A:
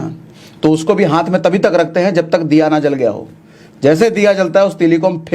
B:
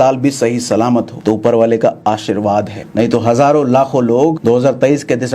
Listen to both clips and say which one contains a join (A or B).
B